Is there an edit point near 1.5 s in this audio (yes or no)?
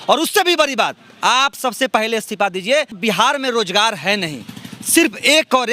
no